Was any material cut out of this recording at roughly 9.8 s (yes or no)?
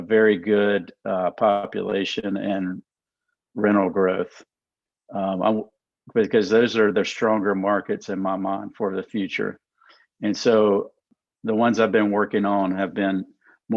no